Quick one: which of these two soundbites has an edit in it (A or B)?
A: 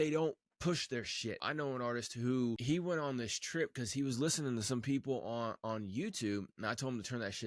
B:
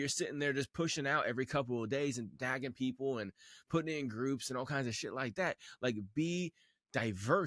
A